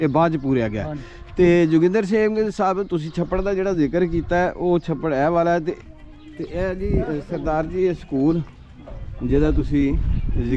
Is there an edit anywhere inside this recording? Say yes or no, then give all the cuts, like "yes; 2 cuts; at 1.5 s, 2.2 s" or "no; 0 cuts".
yes; 1 cut; at 5.8 s